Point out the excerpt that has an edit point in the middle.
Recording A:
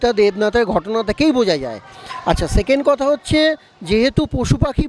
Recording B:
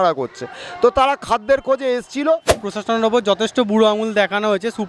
B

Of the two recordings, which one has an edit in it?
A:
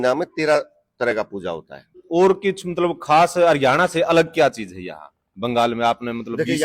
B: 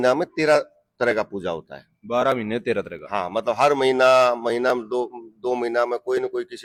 A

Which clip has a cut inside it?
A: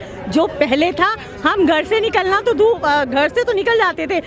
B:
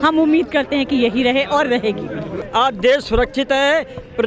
B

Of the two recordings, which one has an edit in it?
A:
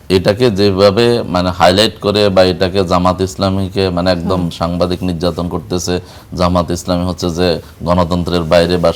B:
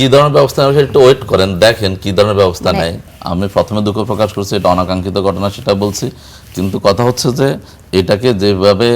B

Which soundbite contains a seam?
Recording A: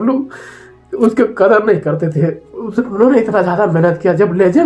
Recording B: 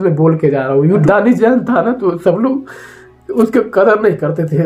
B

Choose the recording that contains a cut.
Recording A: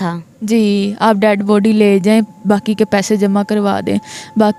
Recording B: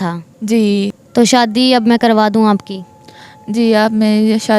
B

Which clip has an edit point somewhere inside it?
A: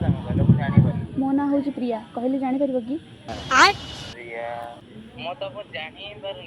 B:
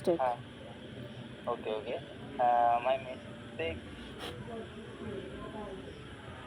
A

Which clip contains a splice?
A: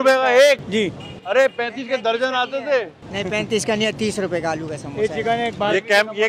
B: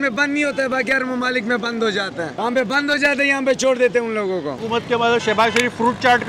B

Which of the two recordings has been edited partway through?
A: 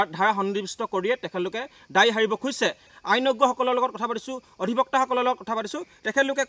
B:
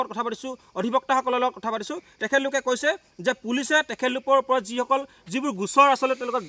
A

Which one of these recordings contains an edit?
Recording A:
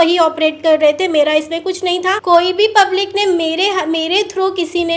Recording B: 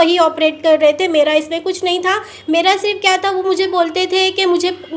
A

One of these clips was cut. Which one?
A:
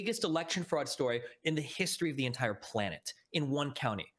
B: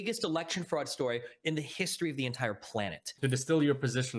B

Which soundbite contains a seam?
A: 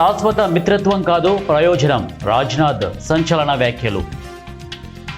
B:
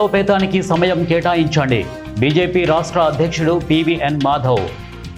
A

